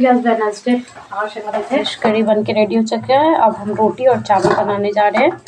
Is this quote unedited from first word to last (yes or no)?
no